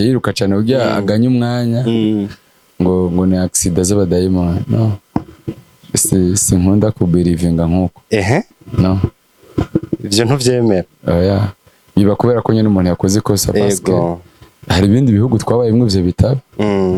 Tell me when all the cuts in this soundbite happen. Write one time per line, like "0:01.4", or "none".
none